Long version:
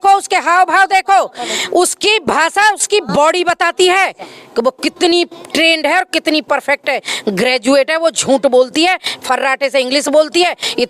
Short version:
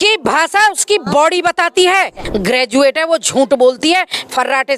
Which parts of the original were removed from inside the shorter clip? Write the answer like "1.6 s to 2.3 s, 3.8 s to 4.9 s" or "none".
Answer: 4.2 s to 7.2 s